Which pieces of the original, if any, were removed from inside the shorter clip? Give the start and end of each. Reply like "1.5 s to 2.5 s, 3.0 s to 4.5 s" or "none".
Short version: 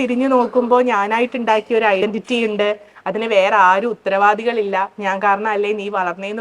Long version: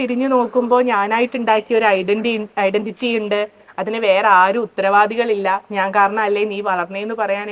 2.0 s to 2.7 s